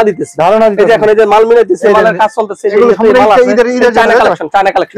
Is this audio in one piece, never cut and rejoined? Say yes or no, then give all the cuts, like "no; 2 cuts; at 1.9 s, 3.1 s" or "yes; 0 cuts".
yes; 0 cuts